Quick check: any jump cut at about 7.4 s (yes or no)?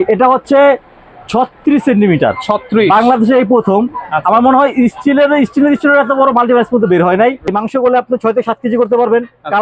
yes